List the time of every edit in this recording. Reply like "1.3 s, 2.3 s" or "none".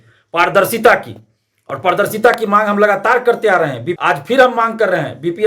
3.9 s